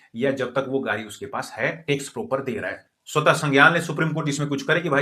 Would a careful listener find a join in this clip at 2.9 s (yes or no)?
yes